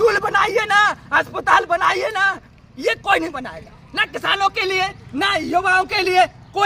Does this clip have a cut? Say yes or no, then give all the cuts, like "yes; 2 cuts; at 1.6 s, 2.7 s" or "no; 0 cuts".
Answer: no; 0 cuts